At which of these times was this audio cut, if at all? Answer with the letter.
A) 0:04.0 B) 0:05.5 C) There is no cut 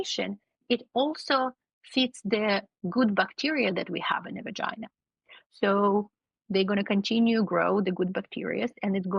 C